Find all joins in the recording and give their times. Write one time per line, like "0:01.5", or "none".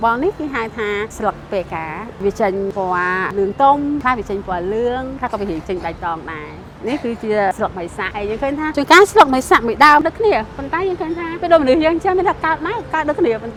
none